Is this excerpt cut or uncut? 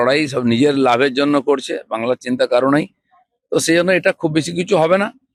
uncut